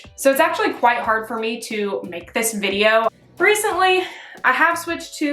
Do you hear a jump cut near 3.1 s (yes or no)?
yes